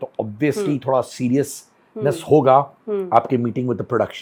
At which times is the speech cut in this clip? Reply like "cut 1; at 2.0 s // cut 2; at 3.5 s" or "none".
none